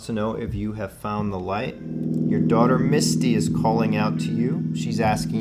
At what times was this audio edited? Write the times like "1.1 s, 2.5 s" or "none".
2.1 s